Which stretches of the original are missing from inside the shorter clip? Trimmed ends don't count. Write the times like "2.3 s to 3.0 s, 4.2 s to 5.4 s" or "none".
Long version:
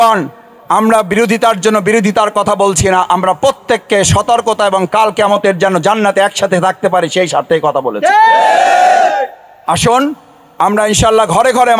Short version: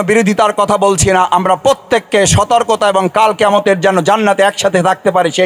none